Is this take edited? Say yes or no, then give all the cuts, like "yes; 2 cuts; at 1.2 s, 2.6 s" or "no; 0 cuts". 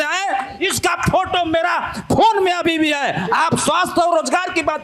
no; 0 cuts